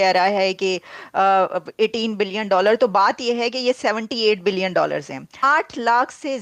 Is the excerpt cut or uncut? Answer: cut